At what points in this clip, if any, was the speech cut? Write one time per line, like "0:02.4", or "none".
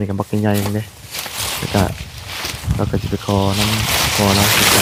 none